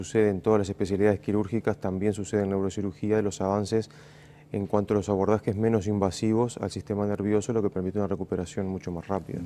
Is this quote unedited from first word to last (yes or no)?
yes